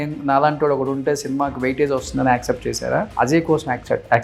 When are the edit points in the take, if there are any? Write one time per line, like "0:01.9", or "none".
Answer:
0:03.1